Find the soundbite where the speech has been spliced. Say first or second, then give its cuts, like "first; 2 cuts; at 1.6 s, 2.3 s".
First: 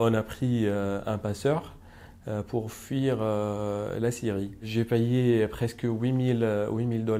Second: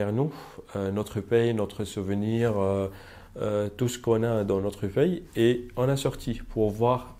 first; 1 cut; at 4.6 s